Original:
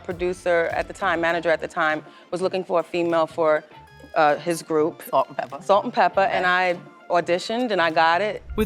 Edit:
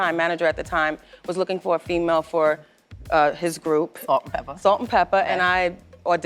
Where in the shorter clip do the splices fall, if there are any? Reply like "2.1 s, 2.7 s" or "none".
none

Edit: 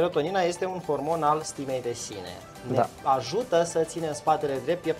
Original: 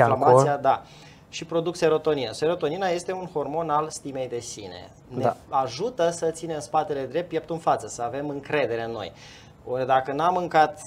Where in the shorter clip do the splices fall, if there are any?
none

